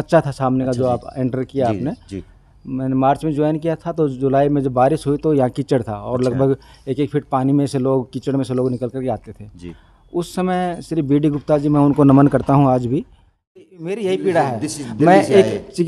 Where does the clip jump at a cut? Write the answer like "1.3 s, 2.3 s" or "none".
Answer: 13.7 s

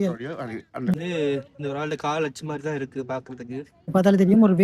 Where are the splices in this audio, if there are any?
0.9 s, 3.9 s

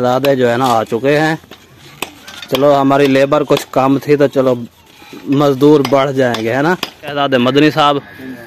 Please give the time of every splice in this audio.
7.1 s

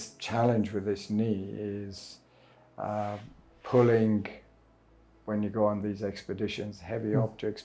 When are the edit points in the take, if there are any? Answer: none

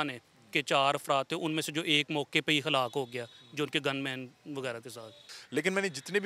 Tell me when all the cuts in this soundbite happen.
5.3 s

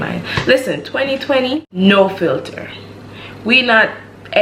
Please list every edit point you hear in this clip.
1.7 s

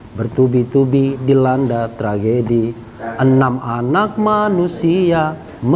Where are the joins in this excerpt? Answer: none

